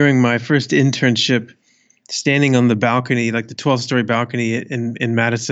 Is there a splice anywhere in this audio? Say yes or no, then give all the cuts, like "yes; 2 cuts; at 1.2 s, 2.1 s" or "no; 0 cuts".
no; 0 cuts